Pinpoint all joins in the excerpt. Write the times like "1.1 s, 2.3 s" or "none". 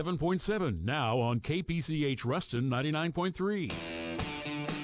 3.8 s